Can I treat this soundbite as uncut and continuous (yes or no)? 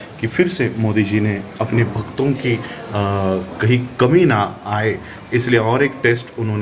yes